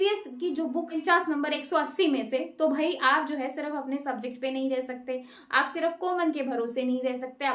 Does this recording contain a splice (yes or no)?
yes